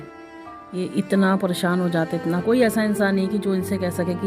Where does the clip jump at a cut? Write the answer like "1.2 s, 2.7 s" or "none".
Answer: 2.4 s